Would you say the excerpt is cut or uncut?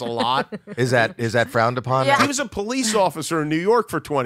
cut